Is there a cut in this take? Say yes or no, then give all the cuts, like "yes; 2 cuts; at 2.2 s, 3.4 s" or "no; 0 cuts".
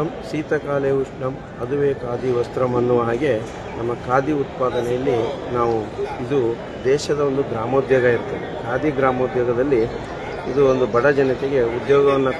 no; 0 cuts